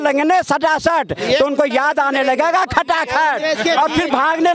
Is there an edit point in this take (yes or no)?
no